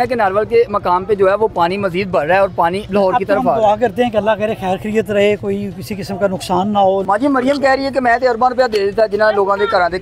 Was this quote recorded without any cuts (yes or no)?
no